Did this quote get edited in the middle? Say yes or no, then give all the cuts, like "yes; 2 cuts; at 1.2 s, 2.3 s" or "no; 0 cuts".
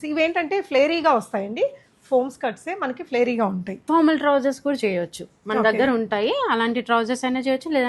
yes; 1 cut; at 3.7 s